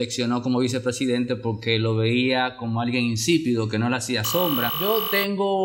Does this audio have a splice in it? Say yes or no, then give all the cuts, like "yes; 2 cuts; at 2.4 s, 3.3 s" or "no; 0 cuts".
yes; 1 cut; at 4.7 s